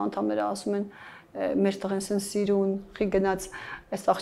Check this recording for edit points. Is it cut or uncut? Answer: uncut